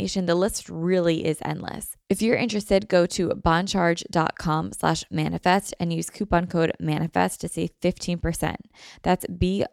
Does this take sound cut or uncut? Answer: cut